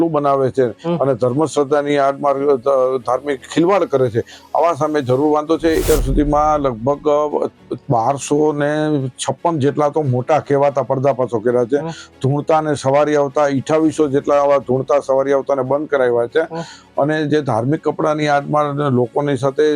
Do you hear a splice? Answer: yes; 1 cut; at 5.8 s

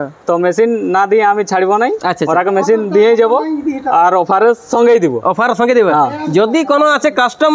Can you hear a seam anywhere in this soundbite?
no; 0 cuts

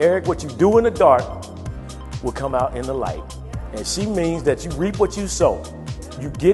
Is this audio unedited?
yes; 0 cuts

